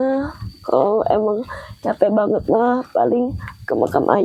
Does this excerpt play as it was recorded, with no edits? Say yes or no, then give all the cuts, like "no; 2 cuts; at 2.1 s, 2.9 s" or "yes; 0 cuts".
yes; 0 cuts